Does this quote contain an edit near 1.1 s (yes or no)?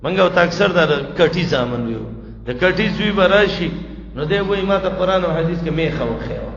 no